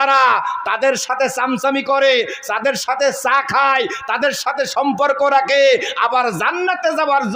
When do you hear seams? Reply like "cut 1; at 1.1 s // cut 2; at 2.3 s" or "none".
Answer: none